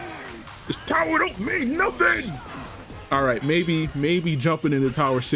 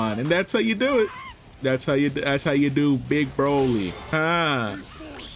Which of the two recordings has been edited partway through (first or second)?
second